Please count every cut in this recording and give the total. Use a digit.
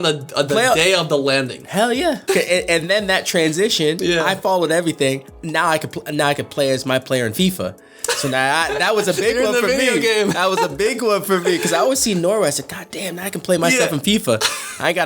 1